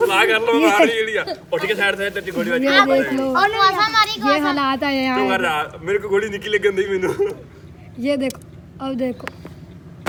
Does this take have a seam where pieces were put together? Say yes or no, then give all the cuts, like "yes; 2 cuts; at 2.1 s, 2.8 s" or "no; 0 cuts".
no; 0 cuts